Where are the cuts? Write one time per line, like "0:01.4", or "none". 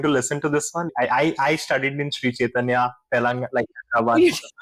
none